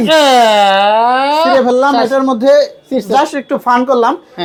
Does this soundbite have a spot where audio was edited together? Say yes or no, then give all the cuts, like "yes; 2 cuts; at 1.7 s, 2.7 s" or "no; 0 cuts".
no; 0 cuts